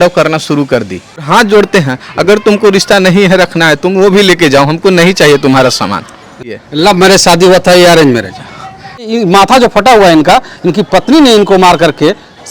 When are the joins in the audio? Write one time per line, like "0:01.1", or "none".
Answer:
0:01.3
0:06.6
0:09.1